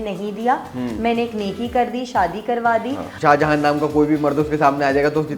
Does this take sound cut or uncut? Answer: cut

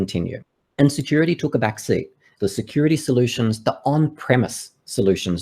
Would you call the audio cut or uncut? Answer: cut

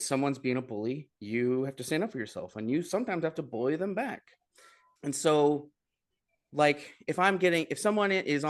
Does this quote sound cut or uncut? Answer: uncut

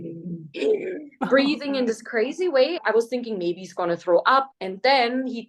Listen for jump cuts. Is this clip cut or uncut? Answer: cut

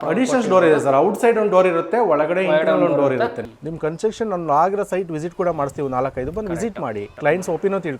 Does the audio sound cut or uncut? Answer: cut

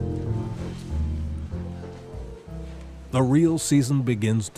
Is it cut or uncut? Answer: uncut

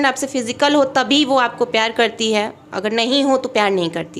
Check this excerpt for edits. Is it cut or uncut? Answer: uncut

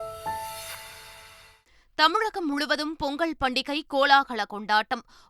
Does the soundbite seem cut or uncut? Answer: cut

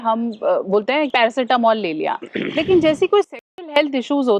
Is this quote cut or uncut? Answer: cut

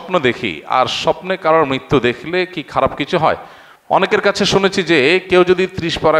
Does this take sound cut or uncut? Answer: cut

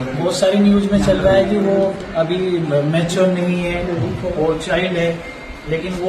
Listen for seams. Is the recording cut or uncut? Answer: uncut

